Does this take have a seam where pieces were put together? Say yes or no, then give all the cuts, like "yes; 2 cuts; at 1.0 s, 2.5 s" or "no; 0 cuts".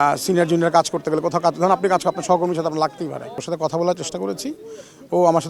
yes; 1 cut; at 3.5 s